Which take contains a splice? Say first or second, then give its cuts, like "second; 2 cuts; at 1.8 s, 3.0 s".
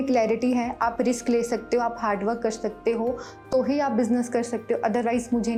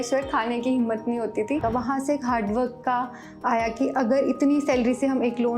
second; 1 cut; at 1.6 s